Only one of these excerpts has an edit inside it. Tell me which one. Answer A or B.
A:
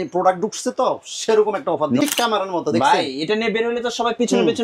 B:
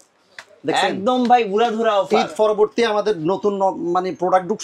A